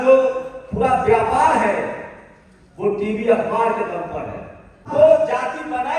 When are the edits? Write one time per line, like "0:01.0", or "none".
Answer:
0:04.9

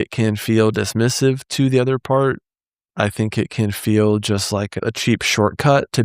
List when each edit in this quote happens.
0:04.8

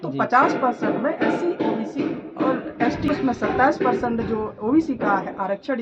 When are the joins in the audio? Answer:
0:03.1

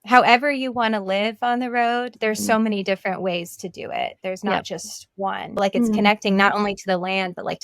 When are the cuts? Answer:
0:05.5

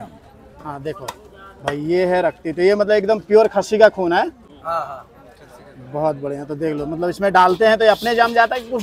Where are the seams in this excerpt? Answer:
none

